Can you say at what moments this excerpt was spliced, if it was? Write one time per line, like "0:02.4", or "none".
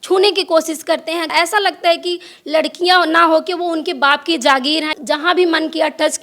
0:01.3
0:04.9